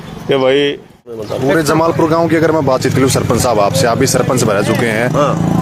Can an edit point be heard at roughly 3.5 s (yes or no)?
no